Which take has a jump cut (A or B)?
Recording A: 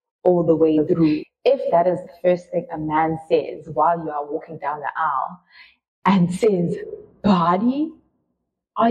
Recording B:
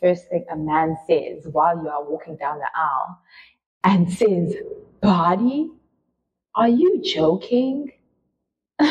A